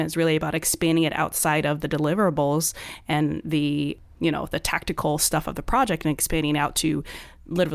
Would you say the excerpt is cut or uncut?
uncut